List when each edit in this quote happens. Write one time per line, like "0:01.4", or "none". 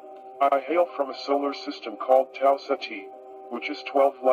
none

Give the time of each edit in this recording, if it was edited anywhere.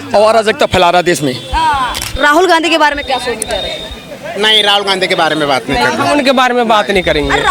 0:02.1

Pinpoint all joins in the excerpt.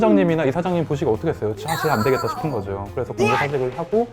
none

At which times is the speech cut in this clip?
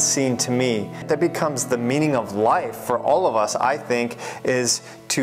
0:01.0

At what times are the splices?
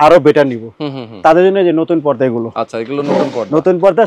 none

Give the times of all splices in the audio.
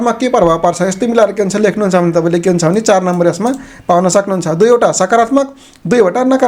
none

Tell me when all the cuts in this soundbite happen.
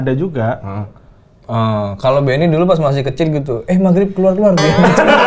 none

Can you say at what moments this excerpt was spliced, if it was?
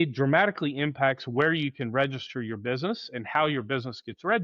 none

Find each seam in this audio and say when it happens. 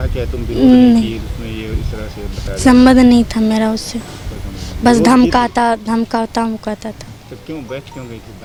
none

